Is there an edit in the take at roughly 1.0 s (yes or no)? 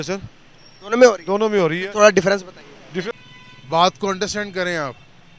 no